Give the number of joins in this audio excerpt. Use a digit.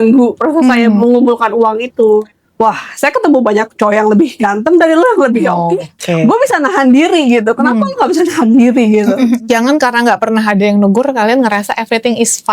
2